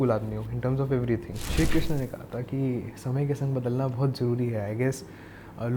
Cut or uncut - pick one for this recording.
cut